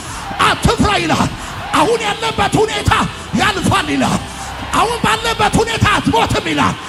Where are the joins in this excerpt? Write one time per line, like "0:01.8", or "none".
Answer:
none